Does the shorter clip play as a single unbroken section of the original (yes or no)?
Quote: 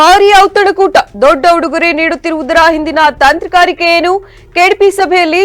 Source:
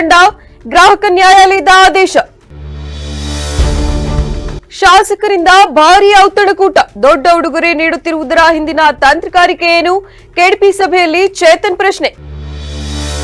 yes